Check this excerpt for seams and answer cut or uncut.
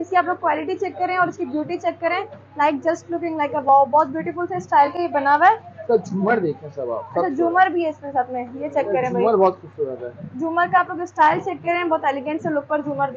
uncut